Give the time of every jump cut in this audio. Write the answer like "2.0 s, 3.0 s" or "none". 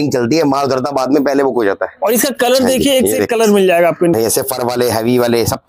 4.1 s